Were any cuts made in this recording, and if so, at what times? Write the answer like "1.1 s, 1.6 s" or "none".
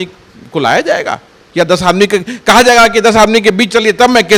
none